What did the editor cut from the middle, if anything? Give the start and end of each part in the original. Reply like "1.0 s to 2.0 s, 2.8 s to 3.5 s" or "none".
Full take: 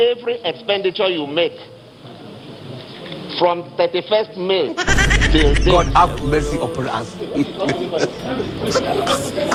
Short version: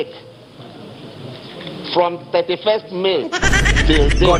none